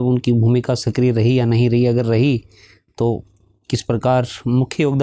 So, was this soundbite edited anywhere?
no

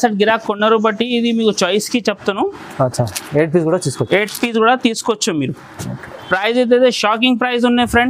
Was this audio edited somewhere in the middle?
no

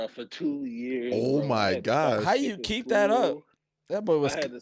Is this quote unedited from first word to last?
yes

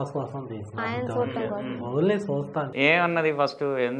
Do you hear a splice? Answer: yes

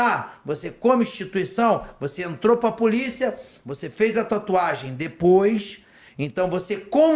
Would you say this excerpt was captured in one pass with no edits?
yes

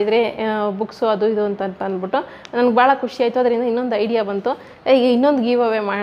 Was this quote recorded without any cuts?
yes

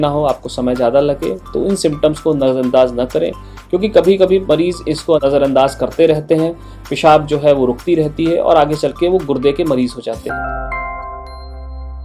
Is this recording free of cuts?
no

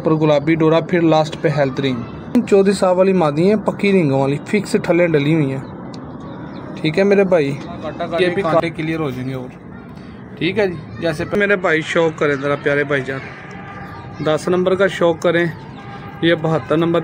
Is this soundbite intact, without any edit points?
no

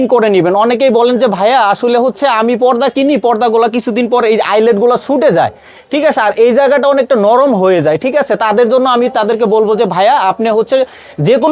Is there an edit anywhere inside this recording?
no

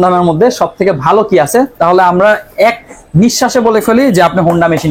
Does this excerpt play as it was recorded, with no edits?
yes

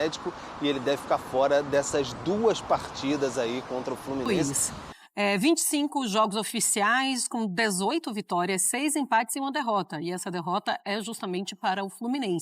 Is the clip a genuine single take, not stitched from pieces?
no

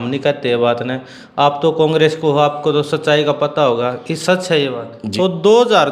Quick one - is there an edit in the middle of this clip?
yes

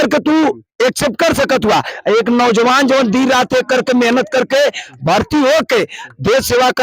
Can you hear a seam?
no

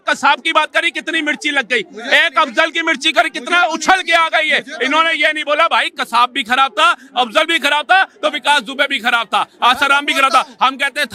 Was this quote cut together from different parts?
no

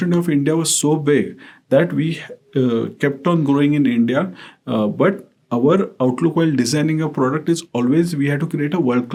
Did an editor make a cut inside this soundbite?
no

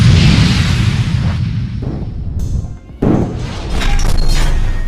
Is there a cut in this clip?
yes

